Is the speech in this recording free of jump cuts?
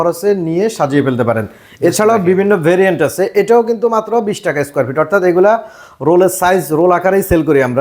yes; 0 cuts

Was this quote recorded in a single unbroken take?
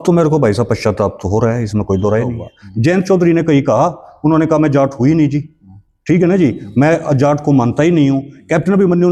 no; 1 cut; at 2.4 s

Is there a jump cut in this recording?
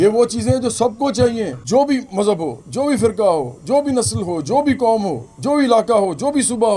no; 0 cuts

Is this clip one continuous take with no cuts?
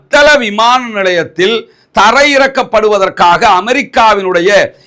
yes; 0 cuts

